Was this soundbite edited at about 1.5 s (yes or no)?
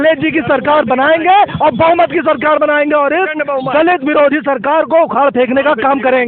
no